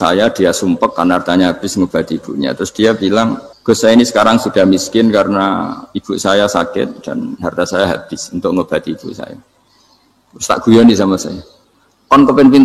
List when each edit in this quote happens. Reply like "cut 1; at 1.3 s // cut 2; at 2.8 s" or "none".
cut 1; at 3.5 s